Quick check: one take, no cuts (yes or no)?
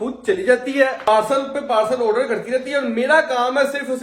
no